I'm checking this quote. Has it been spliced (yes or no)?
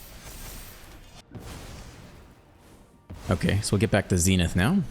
yes